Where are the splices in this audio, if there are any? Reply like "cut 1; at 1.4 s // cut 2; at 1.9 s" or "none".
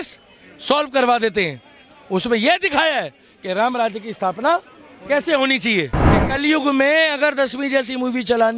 cut 1; at 6.2 s